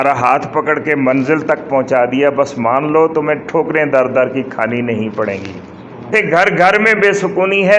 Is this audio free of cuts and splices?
no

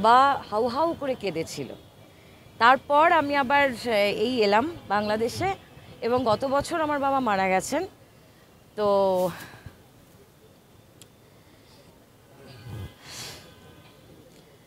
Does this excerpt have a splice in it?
no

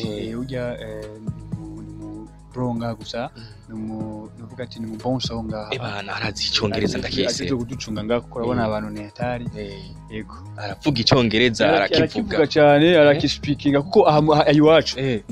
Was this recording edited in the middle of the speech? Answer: no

